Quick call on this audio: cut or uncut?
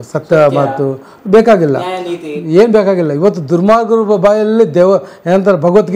uncut